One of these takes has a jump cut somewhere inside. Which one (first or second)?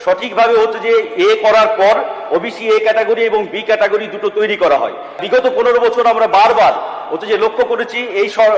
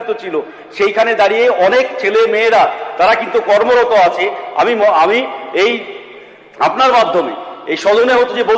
first